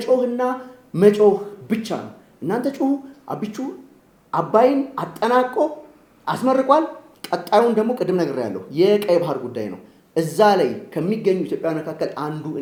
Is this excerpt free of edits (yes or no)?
yes